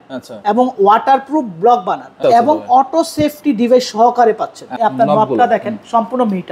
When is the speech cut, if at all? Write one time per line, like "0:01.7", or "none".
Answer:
0:02.2
0:04.8